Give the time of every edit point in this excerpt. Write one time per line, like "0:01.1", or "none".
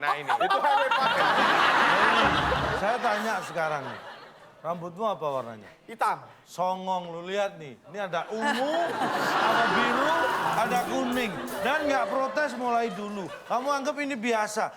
0:02.8